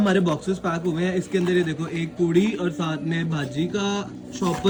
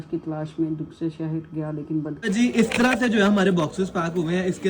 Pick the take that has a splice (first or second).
second